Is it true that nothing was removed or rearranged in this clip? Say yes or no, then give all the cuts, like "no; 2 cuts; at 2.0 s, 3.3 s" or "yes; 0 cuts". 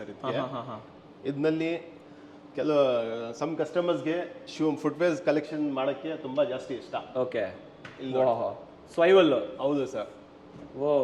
yes; 0 cuts